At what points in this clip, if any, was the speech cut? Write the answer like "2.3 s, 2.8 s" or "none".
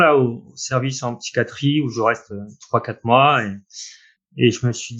3.9 s